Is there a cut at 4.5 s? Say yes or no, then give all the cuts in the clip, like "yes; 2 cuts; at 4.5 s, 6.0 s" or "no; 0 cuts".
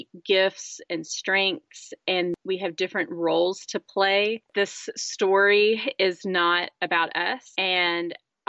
yes; 2 cuts; at 2.3 s, 4.5 s